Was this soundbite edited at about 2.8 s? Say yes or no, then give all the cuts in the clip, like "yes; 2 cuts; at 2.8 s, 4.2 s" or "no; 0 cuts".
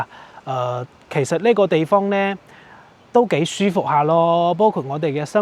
no; 0 cuts